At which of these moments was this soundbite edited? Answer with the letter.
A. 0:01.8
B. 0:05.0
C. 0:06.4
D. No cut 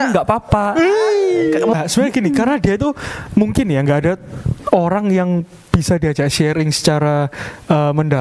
A